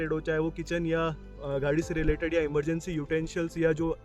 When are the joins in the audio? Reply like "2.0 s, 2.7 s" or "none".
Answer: none